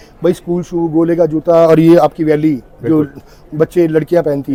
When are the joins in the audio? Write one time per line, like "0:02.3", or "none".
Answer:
none

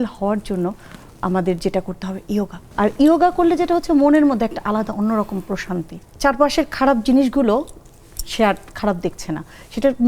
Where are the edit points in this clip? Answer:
0:02.6
0:06.0

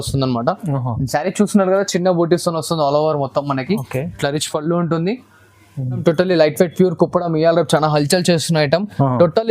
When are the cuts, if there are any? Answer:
0:06.0

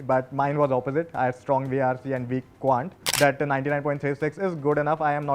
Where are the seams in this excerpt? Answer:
0:03.0

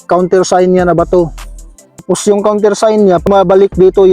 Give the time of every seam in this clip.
0:02.0
0:03.3

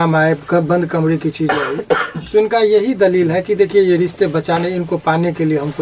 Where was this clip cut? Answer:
none

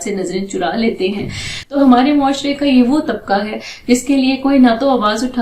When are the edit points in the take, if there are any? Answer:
0:01.8

